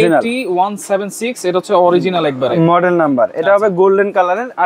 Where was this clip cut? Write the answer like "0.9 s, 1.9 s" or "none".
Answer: none

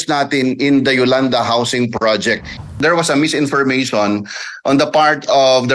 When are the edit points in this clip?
2.6 s

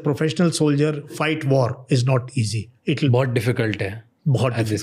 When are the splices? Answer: 1.1 s, 3.1 s

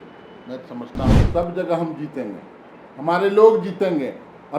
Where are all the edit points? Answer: 1.2 s

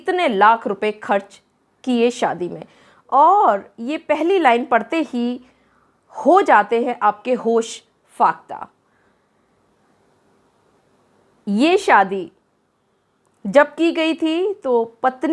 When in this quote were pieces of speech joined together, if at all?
none

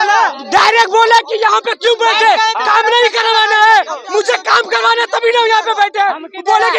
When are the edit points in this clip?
none

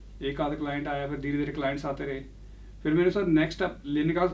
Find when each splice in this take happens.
none

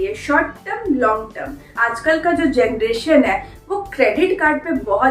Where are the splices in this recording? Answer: 1.7 s

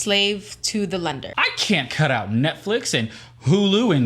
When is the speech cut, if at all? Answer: 1.3 s

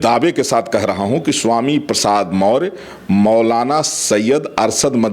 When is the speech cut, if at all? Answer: none

